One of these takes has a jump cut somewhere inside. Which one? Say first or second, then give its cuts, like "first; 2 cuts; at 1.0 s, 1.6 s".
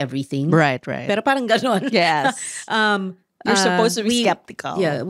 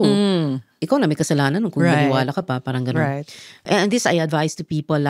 second; 1 cut; at 3.6 s